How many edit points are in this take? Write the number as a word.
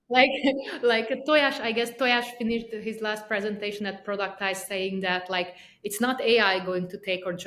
zero